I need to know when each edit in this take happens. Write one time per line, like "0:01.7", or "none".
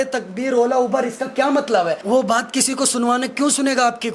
0:02.0